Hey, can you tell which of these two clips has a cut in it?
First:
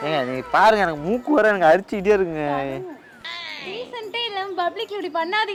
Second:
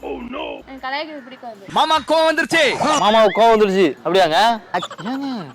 second; 2 cuts; at 3.0 s, 4.6 s

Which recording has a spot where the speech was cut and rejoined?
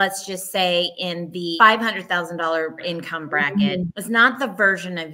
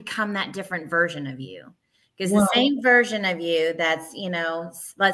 first; 3 cuts; at 1.5 s, 2.8 s, 4.0 s

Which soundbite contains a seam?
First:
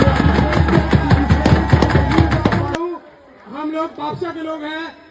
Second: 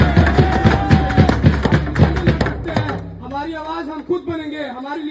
first; 1 cut; at 2.7 s

